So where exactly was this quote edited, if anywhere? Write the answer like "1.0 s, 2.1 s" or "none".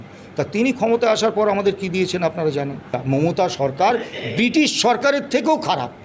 2.9 s